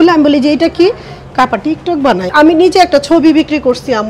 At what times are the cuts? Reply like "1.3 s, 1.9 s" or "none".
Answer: 2.3 s